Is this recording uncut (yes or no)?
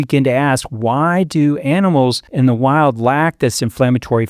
no